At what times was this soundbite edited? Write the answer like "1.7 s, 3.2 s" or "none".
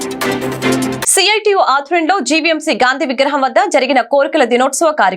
1.0 s